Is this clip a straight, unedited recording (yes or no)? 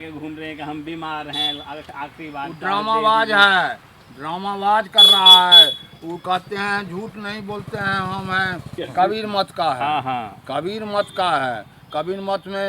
yes